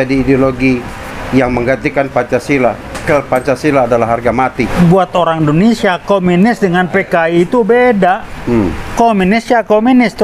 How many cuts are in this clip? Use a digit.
2